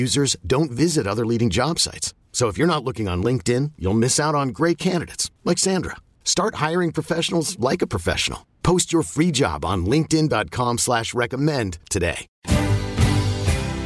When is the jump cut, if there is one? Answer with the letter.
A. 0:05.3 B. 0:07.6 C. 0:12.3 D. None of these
C